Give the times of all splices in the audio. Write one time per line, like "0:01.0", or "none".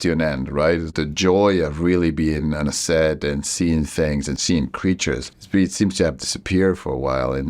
0:00.9
0:04.4
0:05.3